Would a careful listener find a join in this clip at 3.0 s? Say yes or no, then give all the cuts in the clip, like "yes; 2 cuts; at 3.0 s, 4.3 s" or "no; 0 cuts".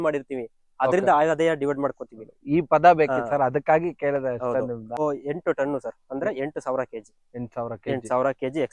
no; 1 cut; at 5.0 s